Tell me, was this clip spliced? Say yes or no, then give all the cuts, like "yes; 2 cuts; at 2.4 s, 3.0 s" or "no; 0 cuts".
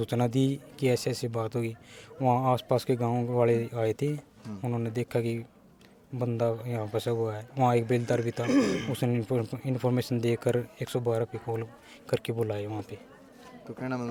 no; 0 cuts